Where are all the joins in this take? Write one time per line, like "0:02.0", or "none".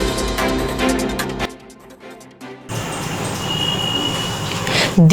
0:01.7

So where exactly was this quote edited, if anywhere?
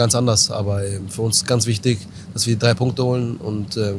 none

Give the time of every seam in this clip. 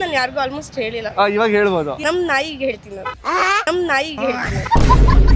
none

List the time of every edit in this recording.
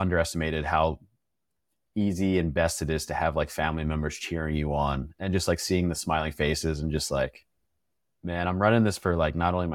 none

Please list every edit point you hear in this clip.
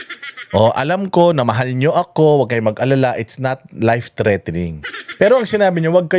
none

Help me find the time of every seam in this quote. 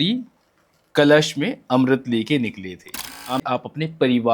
0:03.4

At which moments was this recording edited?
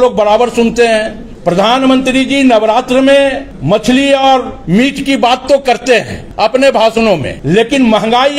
0:01.2
0:03.5
0:04.5
0:06.2
0:07.3

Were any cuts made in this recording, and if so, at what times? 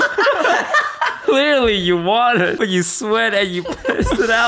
0:01.2
0:02.6

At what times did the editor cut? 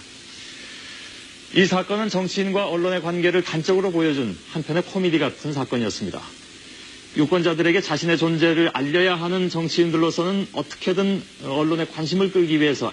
0:04.2

